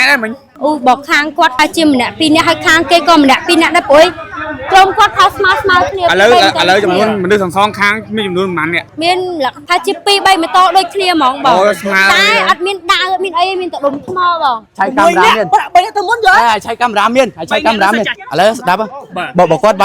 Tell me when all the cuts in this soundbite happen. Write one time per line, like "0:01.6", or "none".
0:08.9
0:09.6
0:14.7